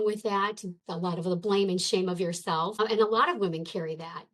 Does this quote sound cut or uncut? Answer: cut